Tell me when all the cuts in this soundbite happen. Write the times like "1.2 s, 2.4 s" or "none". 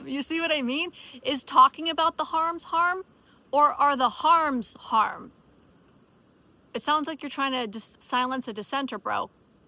8.0 s